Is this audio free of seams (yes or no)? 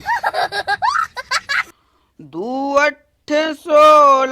no